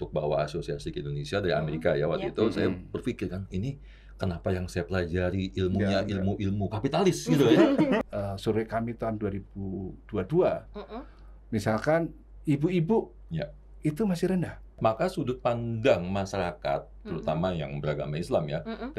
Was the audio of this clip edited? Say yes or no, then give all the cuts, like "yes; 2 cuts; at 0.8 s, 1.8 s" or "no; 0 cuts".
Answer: yes; 2 cuts; at 8.0 s, 14.8 s